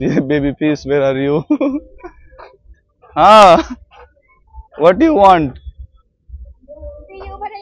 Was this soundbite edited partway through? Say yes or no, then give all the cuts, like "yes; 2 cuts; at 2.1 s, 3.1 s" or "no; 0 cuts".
no; 0 cuts